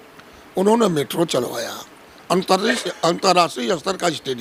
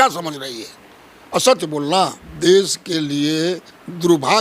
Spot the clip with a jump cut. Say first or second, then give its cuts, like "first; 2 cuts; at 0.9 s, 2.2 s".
second; 1 cut; at 2.2 s